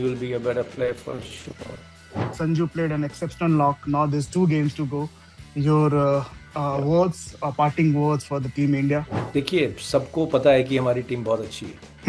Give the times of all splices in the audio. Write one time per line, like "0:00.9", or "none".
0:02.3

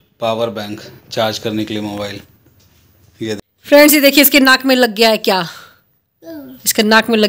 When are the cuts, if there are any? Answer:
0:03.4

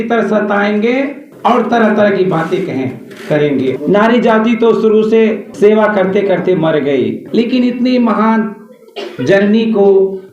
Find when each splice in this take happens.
0:01.2
0:03.8
0:05.5
0:07.2

